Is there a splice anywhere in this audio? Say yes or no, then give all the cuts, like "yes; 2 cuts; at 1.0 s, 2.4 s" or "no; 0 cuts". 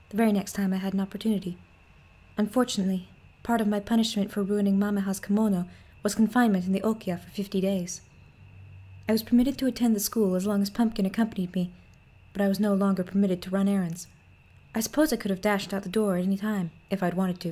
yes; 1 cut; at 15.4 s